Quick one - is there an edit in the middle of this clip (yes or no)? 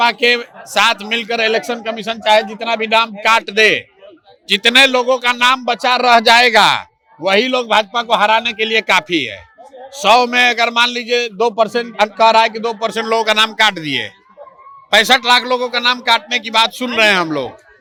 no